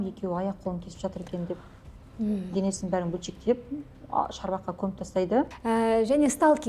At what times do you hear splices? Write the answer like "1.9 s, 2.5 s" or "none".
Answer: 2.5 s, 5.5 s